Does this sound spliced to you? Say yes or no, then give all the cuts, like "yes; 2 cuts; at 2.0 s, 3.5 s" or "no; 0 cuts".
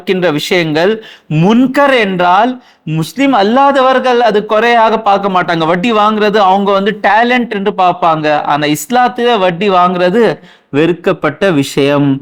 no; 0 cuts